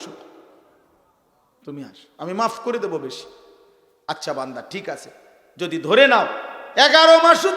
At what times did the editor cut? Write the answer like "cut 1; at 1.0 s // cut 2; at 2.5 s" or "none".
cut 1; at 3.9 s